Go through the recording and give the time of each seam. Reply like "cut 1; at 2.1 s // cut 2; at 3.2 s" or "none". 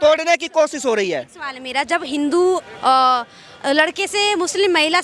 none